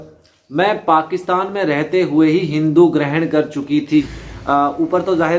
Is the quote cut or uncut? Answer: cut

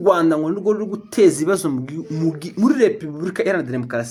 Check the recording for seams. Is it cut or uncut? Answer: uncut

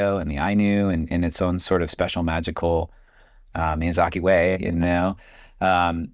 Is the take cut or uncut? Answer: uncut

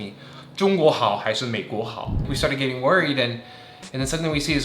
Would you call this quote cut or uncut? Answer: cut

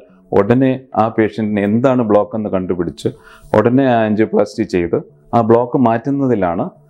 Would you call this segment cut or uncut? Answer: uncut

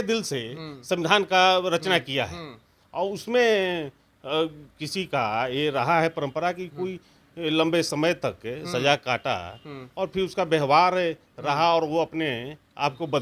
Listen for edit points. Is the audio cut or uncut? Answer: uncut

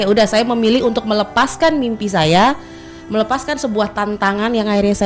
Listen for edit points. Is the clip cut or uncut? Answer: uncut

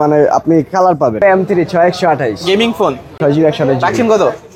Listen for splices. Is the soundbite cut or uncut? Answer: cut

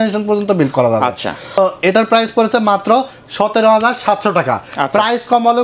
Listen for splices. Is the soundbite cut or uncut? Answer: uncut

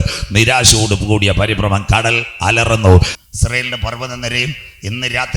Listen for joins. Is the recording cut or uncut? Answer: cut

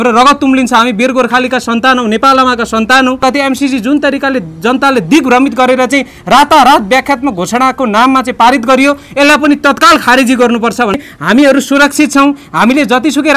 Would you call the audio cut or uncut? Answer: cut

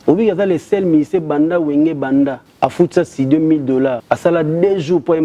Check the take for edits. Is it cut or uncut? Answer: cut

